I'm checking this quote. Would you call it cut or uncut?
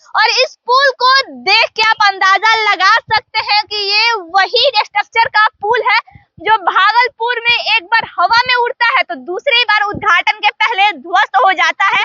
uncut